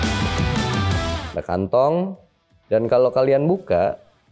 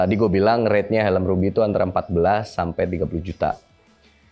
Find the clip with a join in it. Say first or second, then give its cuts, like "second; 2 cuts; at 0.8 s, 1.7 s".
first; 1 cut; at 1.2 s